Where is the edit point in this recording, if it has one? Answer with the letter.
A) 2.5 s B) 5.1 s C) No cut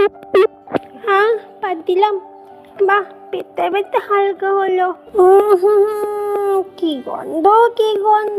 B